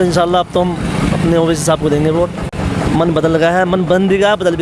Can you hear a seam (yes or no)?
no